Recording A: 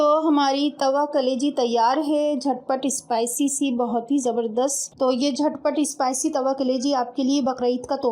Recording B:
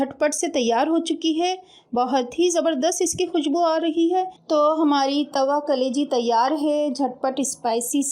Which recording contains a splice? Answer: A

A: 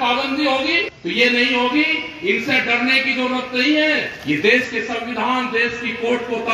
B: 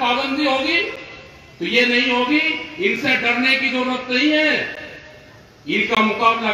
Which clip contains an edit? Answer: A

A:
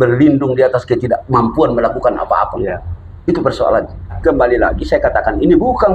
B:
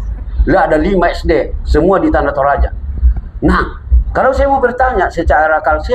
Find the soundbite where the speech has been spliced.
A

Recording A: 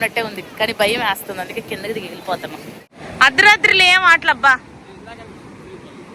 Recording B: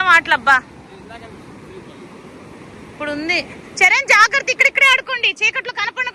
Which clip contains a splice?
A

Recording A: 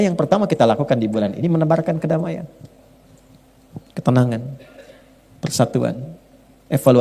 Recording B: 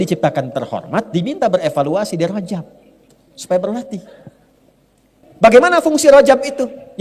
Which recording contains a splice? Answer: B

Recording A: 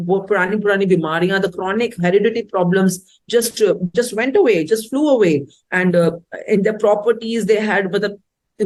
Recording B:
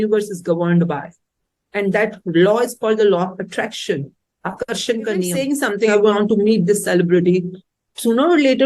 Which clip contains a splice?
B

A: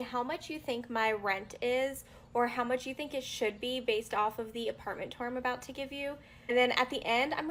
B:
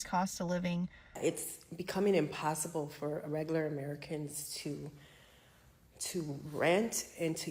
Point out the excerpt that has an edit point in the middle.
B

